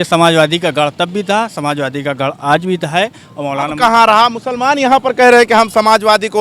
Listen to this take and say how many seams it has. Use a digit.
0